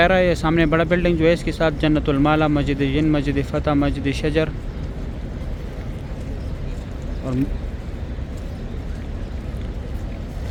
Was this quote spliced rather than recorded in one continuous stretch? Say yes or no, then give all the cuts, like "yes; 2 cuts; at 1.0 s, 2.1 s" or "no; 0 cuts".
no; 0 cuts